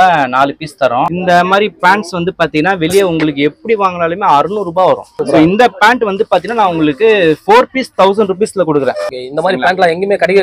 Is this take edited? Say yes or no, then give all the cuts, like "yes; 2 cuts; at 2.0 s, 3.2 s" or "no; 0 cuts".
yes; 3 cuts; at 1.1 s, 5.1 s, 9.1 s